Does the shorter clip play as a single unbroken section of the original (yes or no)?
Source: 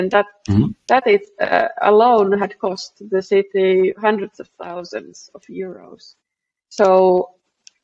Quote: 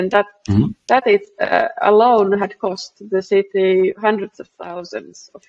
yes